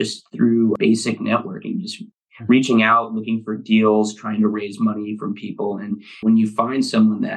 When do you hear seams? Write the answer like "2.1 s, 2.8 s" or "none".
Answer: none